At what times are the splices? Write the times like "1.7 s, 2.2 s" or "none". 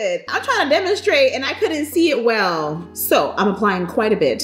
2.8 s